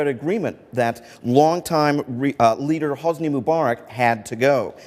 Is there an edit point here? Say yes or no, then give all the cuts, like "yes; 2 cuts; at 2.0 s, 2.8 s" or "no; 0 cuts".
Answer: yes; 1 cut; at 3.7 s